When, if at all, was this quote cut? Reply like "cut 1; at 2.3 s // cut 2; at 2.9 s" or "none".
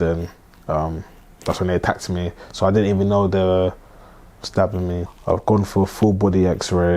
cut 1; at 5.1 s

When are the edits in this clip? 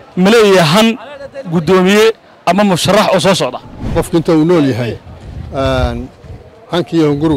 cut 1; at 3.9 s

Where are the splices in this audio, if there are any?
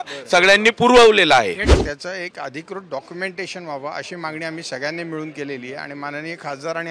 cut 1; at 1.7 s

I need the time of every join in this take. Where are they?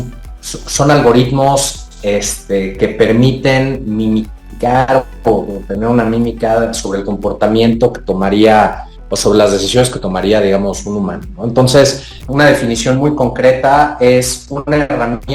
cut 1; at 12.2 s

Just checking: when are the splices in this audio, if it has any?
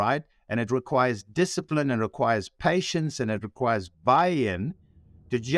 none

